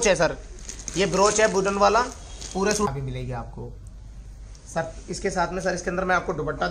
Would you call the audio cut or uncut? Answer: cut